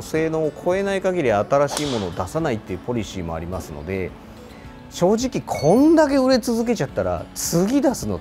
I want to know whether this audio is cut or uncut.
uncut